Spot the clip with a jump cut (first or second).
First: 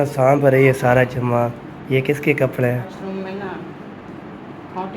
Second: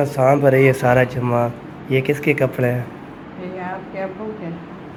first